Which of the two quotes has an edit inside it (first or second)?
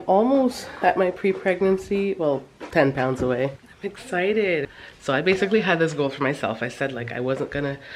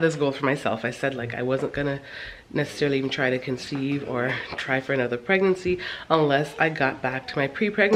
first